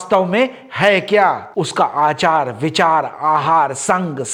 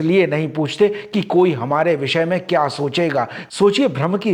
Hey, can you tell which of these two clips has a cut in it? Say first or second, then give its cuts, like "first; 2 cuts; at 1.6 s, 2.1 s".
second; 1 cut; at 3.4 s